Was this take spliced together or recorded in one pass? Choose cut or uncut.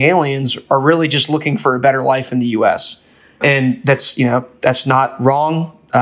uncut